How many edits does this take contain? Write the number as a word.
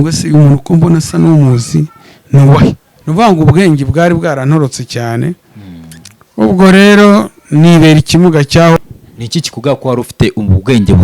two